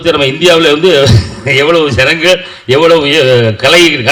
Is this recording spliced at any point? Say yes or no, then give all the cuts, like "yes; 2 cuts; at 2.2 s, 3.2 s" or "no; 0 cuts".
no; 0 cuts